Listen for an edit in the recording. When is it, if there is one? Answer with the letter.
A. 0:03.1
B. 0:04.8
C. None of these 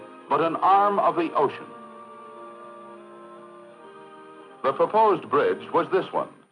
A